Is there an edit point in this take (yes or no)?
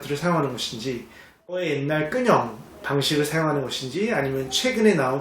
yes